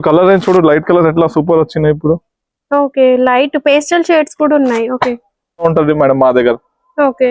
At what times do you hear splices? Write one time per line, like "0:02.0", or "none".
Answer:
0:05.6